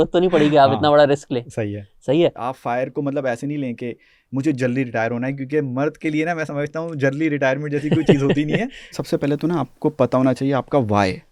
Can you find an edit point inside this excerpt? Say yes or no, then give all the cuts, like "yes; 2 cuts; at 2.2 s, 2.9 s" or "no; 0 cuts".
yes; 2 cuts; at 2.5 s, 8.9 s